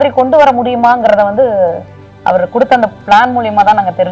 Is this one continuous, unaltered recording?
yes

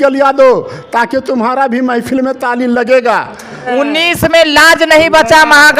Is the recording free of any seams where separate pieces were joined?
no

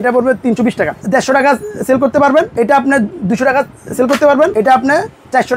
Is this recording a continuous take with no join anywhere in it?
no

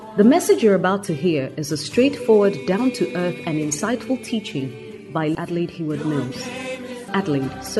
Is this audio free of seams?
no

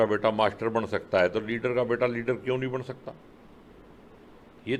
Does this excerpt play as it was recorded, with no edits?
yes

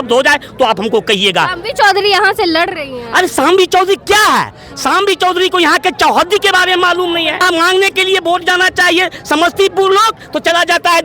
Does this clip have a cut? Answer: yes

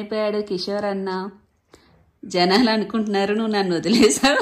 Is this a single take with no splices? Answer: yes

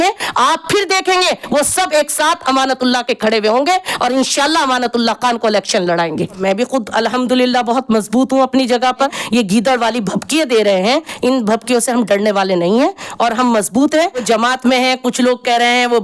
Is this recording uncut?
no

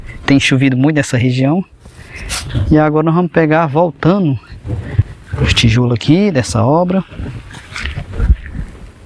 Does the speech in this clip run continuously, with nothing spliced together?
yes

